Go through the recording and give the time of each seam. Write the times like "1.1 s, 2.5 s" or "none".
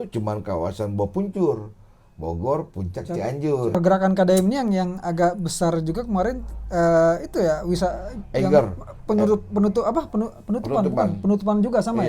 3.7 s